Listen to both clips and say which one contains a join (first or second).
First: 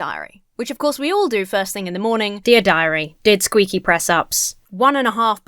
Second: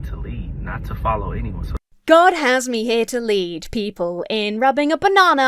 first